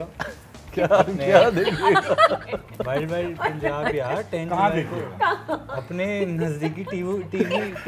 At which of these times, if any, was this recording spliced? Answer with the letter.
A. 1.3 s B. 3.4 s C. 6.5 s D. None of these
D